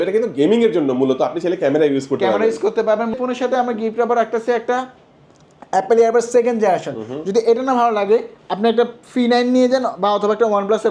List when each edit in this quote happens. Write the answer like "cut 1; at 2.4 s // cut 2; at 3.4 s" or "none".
cut 1; at 3.2 s